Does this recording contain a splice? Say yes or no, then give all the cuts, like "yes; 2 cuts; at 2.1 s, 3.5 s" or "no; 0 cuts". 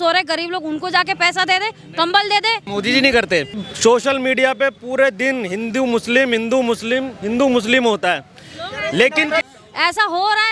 yes; 3 cuts; at 2.6 s, 3.7 s, 9.5 s